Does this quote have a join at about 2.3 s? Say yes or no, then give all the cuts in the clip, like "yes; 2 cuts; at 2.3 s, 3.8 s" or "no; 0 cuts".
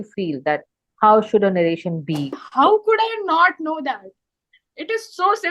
yes; 1 cut; at 2.3 s